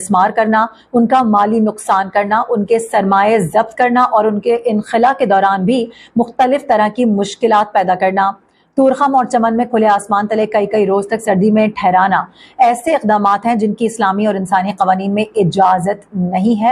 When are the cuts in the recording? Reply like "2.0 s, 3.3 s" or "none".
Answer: none